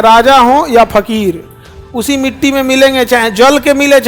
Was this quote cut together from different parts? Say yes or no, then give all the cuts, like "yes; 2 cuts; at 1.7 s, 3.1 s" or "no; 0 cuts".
no; 0 cuts